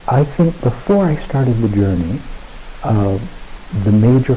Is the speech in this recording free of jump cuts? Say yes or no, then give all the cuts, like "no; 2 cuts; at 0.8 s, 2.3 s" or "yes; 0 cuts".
yes; 0 cuts